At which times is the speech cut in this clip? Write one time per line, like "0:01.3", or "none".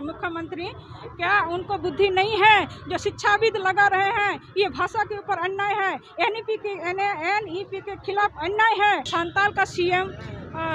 0:09.1